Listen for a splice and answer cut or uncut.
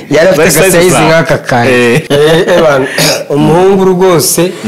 cut